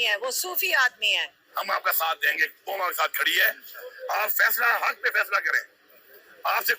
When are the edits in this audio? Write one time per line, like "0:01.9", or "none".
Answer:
0:01.3